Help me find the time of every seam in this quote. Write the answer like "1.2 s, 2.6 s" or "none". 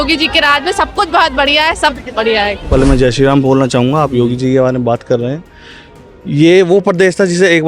2.7 s